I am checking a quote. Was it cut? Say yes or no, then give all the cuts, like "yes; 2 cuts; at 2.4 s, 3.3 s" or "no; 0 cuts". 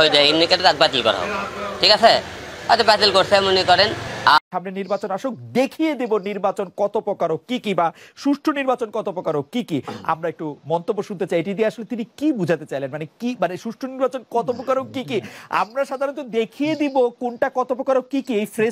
yes; 1 cut; at 4.4 s